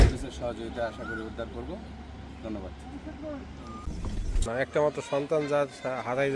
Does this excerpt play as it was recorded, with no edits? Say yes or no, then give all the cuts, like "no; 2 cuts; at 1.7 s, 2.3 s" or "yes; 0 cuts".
no; 1 cut; at 4.5 s